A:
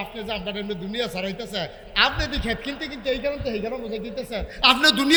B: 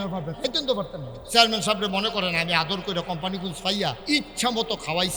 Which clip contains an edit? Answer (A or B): B